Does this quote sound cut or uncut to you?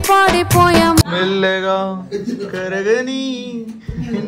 cut